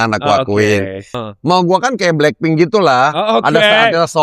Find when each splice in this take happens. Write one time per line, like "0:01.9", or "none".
0:01.2